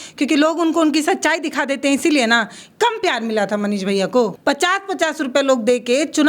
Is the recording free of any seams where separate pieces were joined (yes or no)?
no